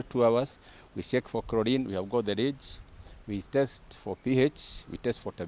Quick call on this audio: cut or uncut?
uncut